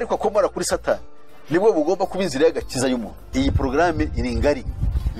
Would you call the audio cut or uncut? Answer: cut